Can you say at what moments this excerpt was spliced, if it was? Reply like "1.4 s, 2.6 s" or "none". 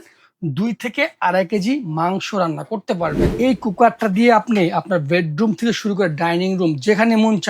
3.2 s

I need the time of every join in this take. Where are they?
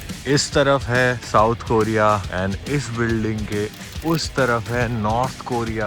1.2 s, 2.3 s

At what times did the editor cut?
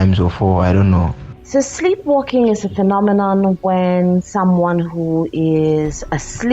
1.2 s

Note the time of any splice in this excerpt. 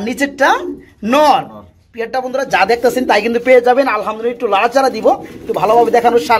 none

